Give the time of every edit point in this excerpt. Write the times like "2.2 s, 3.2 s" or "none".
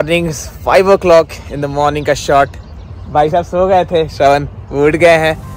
none